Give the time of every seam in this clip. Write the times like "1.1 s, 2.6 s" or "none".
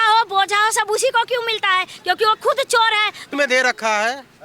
3.3 s